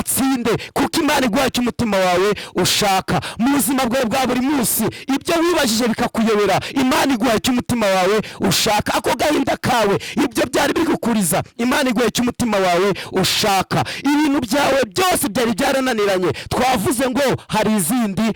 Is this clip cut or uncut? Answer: uncut